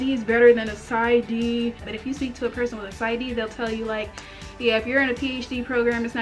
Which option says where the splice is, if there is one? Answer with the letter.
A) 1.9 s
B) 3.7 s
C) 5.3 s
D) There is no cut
A